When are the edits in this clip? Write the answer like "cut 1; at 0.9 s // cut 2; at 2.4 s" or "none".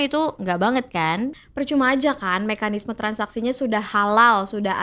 cut 1; at 1.4 s